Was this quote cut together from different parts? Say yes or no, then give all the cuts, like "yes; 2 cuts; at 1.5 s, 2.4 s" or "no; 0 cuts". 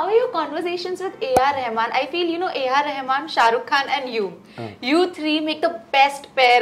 no; 0 cuts